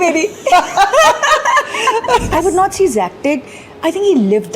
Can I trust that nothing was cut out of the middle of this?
no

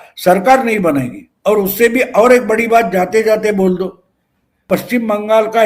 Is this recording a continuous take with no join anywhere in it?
no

